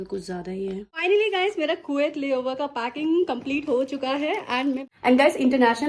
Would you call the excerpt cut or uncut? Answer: cut